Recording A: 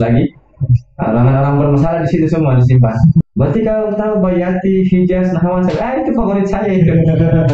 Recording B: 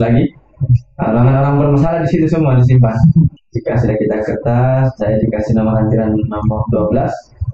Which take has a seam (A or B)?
A